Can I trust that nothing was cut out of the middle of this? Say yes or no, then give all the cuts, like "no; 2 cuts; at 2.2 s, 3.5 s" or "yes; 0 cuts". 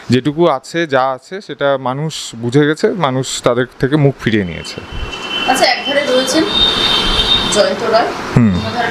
yes; 0 cuts